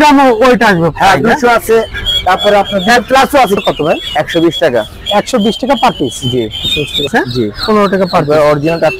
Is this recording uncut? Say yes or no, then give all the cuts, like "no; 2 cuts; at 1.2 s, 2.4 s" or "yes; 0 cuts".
no; 2 cuts; at 3.6 s, 7.1 s